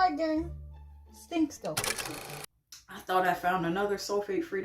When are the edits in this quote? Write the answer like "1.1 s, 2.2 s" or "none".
2.3 s